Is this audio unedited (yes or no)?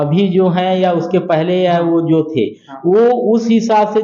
yes